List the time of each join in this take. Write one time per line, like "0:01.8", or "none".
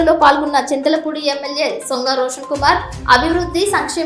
none